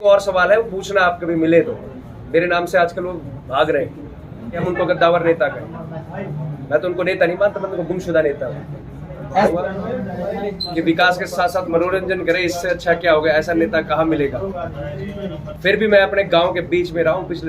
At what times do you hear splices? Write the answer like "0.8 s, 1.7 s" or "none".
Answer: 4.6 s, 9.5 s, 15.5 s

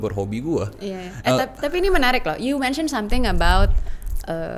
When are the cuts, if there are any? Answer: none

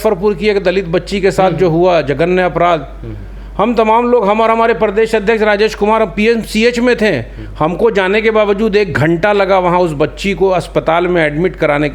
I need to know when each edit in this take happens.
none

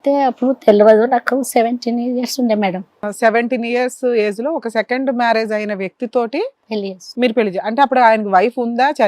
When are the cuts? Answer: 3.1 s

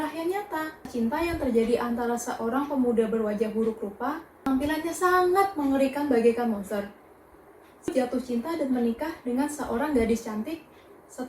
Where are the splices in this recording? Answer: 0.9 s, 4.5 s, 7.9 s

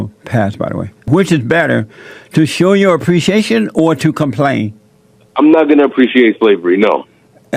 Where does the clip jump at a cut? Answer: 1.1 s

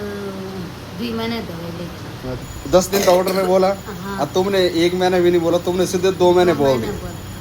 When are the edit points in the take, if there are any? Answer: 2.3 s

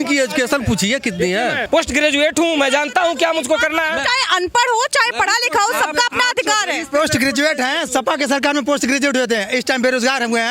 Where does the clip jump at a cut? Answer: 1.6 s

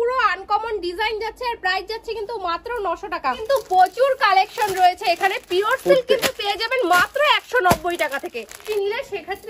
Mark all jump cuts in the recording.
3.4 s, 8.7 s

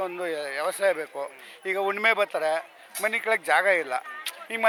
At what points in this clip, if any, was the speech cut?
none

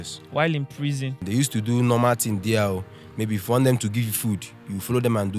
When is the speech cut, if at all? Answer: 1.1 s

